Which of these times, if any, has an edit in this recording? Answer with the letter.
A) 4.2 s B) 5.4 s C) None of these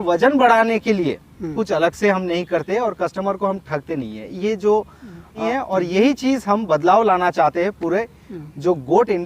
B